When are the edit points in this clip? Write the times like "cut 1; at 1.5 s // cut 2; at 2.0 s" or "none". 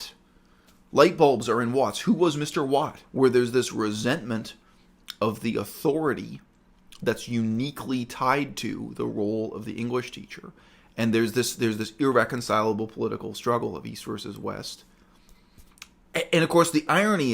cut 1; at 3.0 s